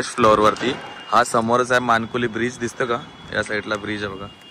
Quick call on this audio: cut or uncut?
uncut